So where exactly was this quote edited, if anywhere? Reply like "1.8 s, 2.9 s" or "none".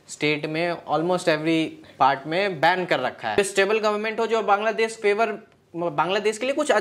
3.4 s